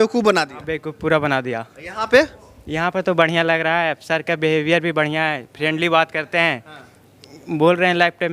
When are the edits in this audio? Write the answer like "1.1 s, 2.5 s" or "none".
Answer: none